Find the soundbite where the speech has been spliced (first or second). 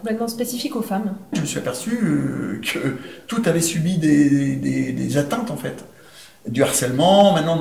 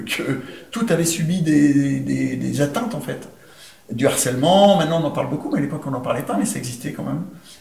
first